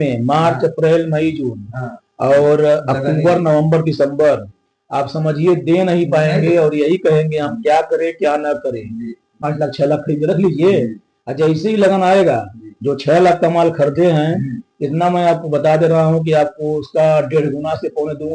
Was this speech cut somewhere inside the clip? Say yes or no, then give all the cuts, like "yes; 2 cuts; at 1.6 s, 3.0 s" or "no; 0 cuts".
yes; 1 cut; at 9.4 s